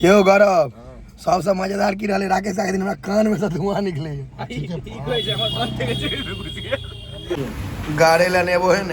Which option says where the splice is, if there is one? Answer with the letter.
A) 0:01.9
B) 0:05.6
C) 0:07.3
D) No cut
C